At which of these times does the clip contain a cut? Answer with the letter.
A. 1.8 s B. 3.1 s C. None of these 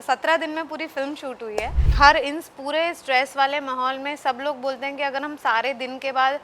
A